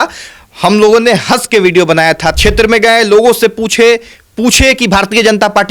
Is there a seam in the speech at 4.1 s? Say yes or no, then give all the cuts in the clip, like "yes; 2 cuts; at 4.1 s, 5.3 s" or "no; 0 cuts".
no; 1 cut; at 2.4 s